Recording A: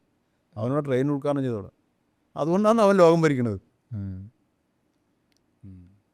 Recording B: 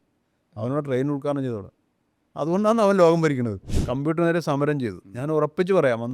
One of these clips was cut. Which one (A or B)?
B